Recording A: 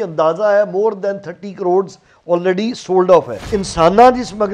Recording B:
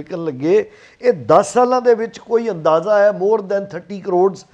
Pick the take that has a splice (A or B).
A